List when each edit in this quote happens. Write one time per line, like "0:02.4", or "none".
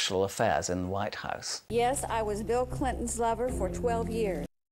0:01.5